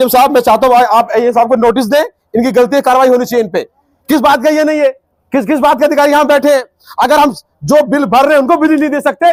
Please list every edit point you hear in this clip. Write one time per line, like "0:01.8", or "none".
none